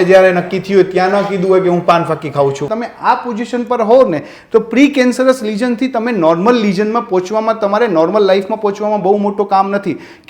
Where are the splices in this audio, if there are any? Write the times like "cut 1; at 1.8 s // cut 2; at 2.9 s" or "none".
cut 1; at 2.7 s